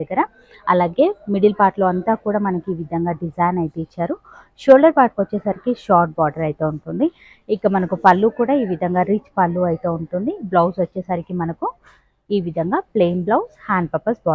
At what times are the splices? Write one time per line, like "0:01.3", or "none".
none